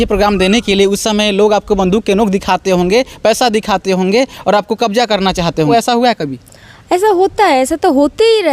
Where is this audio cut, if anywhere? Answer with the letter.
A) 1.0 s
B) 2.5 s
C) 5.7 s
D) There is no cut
C